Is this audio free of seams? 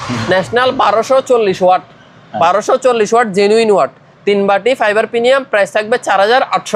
yes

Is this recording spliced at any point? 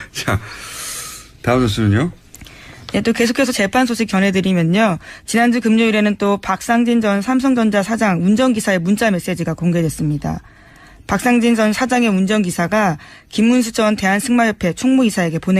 yes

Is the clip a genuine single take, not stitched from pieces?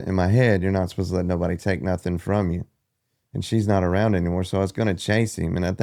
yes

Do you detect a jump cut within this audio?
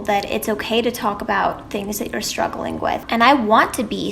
yes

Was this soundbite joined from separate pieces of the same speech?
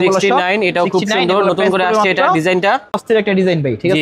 yes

